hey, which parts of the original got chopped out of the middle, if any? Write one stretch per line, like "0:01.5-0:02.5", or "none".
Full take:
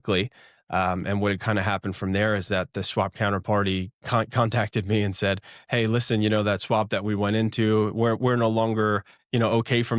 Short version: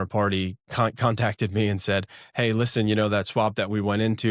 none